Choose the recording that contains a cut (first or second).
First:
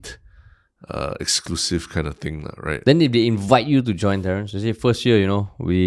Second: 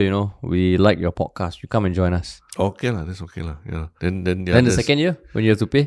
second